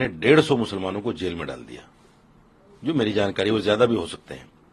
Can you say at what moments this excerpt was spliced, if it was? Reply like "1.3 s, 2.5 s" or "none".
none